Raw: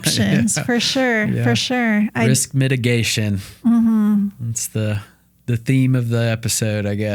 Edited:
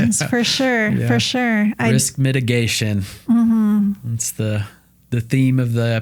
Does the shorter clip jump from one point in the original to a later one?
no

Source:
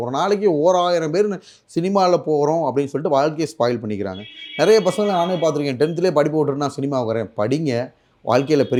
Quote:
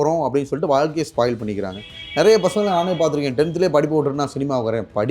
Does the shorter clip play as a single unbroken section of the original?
yes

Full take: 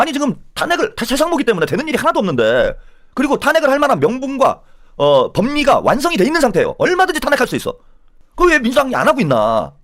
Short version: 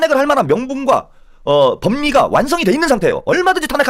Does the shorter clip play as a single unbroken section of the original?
yes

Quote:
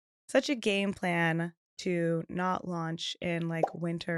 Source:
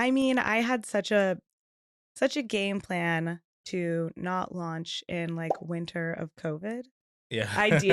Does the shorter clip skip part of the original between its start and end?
no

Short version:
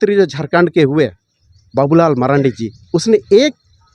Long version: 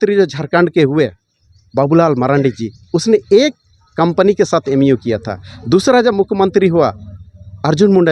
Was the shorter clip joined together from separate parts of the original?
no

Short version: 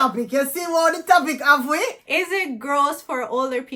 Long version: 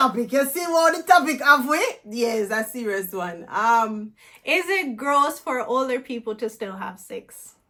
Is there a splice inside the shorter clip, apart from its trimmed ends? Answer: yes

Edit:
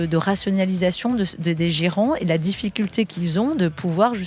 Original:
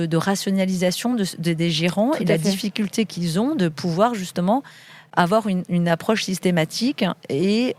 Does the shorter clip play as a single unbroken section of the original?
yes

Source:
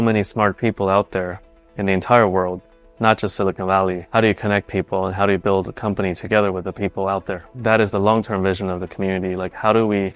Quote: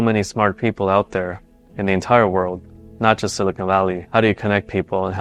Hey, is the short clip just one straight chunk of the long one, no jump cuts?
yes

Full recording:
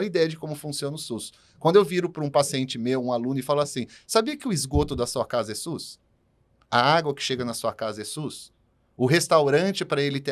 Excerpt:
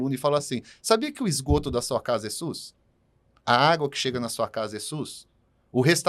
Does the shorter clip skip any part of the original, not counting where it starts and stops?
no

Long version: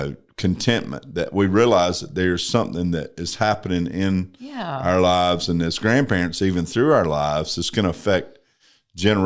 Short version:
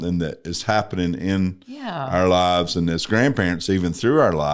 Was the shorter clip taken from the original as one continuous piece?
yes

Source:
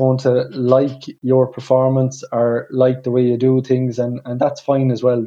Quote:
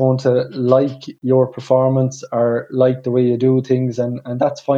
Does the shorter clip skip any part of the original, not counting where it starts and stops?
no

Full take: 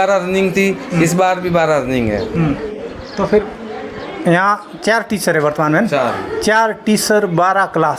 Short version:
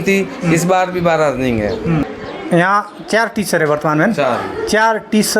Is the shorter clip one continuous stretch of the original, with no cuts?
no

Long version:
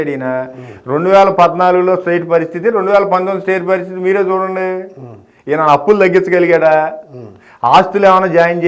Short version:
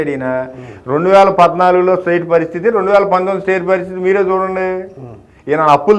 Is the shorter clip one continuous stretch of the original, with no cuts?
yes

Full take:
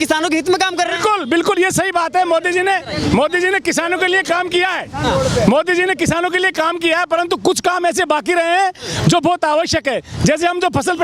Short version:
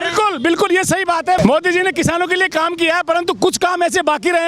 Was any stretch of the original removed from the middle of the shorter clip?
yes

